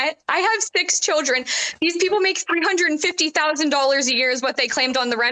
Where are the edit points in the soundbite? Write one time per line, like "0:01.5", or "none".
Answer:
none